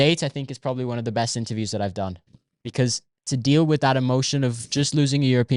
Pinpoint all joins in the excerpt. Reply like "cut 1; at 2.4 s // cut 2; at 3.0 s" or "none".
none